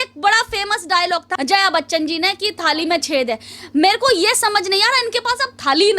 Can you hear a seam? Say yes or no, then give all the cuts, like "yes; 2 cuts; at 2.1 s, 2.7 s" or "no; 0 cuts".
yes; 1 cut; at 1.3 s